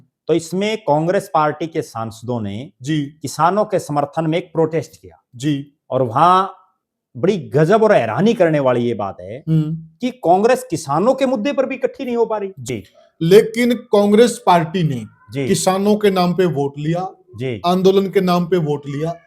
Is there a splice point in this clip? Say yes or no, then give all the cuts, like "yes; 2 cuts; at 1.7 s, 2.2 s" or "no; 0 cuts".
yes; 1 cut; at 12.6 s